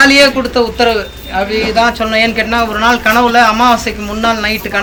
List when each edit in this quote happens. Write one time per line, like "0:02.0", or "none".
none